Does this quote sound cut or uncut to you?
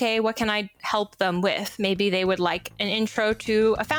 uncut